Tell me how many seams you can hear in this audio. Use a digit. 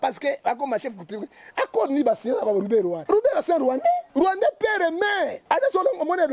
3